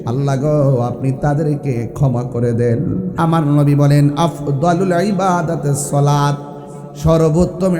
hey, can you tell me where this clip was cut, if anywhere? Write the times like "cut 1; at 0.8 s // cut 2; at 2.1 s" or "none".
cut 1; at 3.1 s